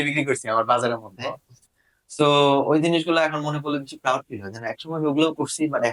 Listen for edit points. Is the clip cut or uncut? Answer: uncut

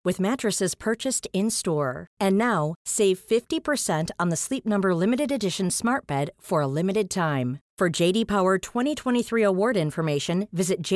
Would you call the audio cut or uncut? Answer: uncut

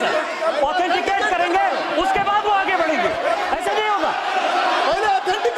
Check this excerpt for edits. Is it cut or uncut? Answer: uncut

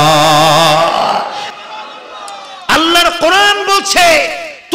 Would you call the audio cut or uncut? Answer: cut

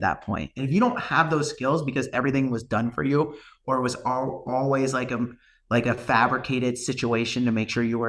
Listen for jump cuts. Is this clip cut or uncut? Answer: uncut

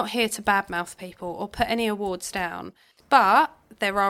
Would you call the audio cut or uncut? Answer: cut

